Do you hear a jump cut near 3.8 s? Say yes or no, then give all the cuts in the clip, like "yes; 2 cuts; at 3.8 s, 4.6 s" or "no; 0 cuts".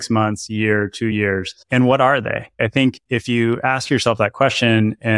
no; 2 cuts; at 1.1 s, 2.5 s